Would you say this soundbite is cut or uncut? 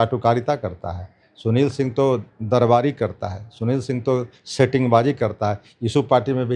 uncut